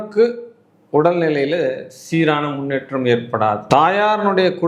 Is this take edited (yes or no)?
no